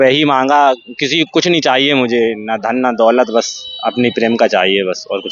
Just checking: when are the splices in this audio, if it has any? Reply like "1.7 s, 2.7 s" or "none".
none